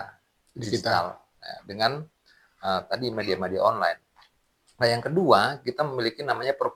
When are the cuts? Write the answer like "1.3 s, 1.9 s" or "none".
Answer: none

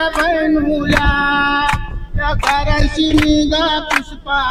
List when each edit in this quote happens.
none

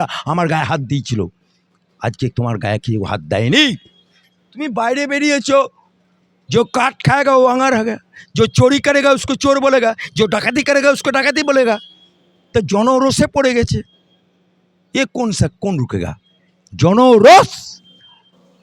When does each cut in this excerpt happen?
none

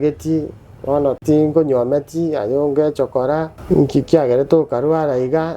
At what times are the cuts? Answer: 1.2 s, 3.6 s

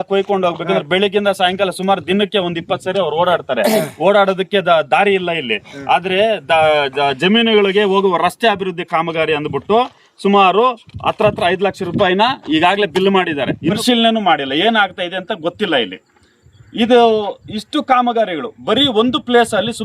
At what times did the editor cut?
13.8 s

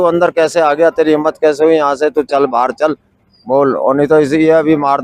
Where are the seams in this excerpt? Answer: none

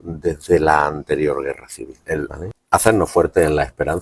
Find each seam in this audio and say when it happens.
2.0 s

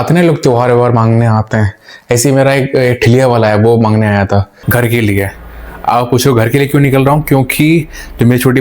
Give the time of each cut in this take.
4.6 s

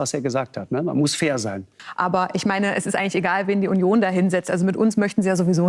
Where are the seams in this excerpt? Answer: 1.7 s

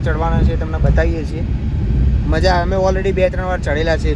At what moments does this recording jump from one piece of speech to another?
none

